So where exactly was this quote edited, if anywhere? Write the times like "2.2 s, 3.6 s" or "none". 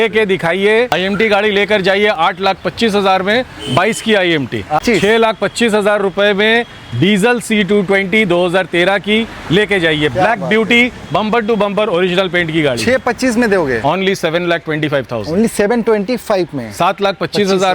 0.9 s, 4.8 s, 13.8 s